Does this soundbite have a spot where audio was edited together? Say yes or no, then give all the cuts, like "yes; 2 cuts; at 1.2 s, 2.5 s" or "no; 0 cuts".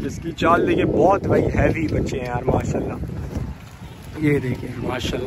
no; 0 cuts